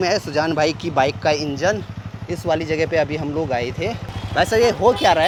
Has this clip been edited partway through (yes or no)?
no